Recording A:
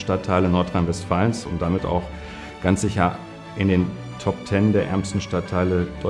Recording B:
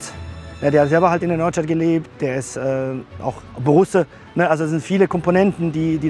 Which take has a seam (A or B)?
B